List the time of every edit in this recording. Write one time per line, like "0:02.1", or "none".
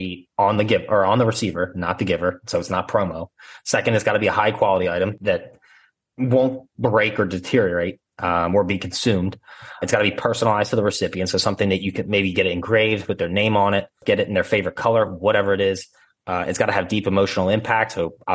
0:05.1
0:09.8
0:14.0